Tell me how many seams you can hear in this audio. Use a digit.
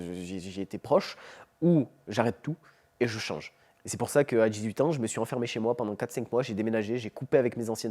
1